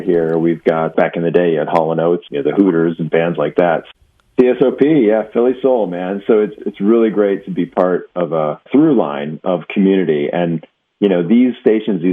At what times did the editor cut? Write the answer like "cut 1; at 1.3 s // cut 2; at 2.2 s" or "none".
cut 1; at 0.9 s // cut 2; at 2.3 s // cut 3; at 3.8 s // cut 4; at 6.5 s // cut 5; at 8.7 s